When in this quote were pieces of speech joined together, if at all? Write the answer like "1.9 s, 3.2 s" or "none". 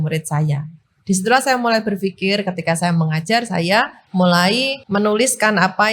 4.0 s, 4.8 s